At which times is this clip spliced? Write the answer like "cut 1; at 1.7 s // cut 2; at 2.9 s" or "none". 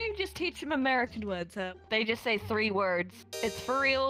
cut 1; at 1.6 s